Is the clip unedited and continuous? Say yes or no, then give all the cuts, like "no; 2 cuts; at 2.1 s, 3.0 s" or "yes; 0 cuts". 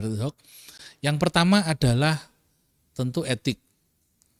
yes; 0 cuts